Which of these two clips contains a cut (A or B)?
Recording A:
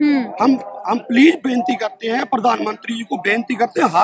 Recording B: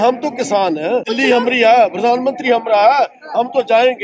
B